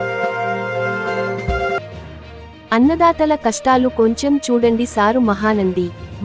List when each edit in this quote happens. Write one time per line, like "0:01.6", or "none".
0:01.8